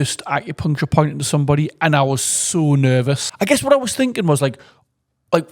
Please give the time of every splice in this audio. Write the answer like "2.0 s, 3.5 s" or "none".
3.3 s